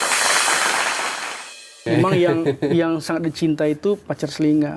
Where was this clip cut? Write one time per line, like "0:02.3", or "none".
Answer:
0:01.8